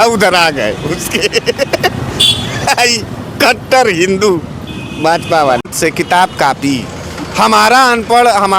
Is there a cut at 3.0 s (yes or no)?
no